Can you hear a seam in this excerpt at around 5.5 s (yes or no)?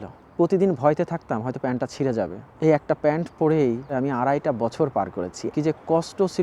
yes